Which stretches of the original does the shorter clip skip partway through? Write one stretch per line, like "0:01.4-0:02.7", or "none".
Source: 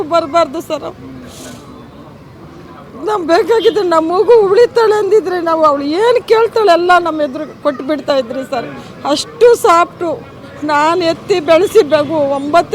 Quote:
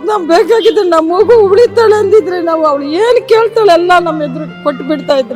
none